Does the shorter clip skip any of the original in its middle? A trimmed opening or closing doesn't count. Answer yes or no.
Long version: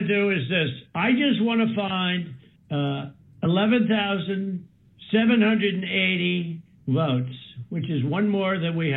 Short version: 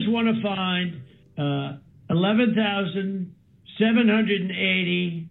no